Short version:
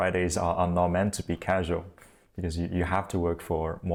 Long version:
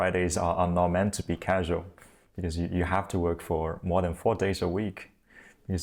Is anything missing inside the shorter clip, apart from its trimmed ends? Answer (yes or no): no